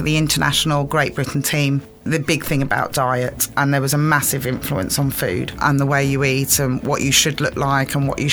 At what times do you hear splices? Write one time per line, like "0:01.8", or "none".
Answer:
0:02.1
0:05.5